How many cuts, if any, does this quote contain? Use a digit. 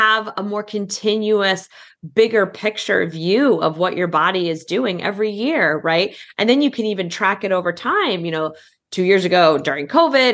0